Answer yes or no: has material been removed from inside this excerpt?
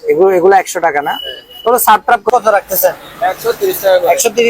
yes